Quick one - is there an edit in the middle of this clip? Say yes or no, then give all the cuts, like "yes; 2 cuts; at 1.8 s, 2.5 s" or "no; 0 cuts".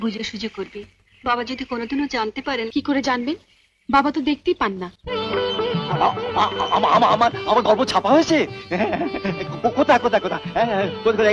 no; 0 cuts